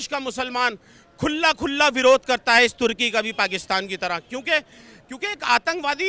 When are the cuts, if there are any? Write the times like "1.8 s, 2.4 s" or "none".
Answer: none